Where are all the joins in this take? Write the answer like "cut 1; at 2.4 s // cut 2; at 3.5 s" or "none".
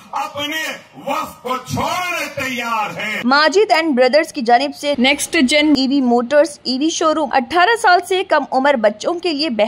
cut 1; at 3.2 s // cut 2; at 7.2 s